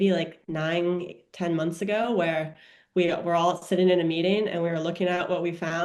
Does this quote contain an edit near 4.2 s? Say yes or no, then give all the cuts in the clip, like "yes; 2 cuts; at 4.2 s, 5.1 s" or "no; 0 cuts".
no; 0 cuts